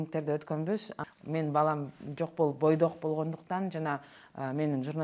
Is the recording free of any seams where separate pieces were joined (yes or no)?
no